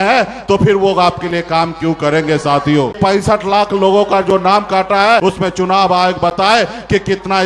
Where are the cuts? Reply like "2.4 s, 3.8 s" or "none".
3.0 s, 5.2 s